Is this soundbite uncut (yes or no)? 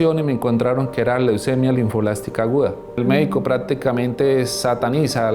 no